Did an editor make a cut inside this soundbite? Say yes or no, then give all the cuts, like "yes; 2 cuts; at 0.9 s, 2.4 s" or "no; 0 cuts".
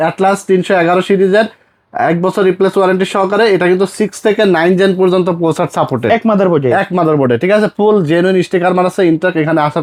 no; 0 cuts